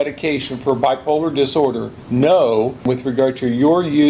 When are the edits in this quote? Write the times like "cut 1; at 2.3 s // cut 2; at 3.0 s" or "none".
cut 1; at 1.9 s // cut 2; at 2.8 s